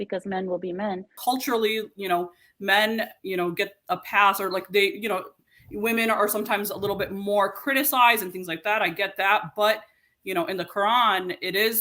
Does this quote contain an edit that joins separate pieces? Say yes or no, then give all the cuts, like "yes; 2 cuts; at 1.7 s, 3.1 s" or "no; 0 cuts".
yes; 1 cut; at 1.1 s